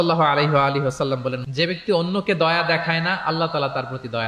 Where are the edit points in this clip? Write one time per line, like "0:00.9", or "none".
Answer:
0:01.4